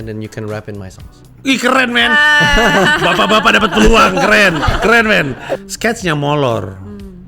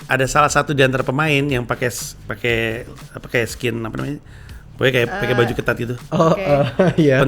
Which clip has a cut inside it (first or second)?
first